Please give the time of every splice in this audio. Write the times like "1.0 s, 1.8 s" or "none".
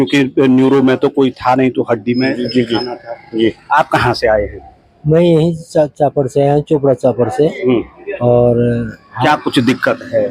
none

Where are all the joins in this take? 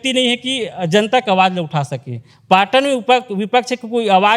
none

